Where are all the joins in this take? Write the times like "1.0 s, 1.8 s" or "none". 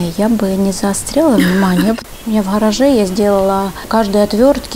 2.0 s, 3.8 s